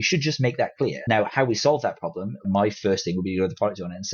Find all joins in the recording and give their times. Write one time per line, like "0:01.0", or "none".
0:01.0
0:02.4